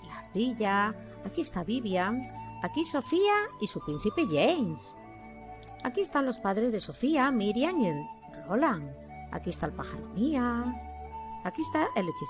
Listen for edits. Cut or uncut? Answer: uncut